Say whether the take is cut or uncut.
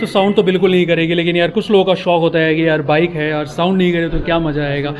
uncut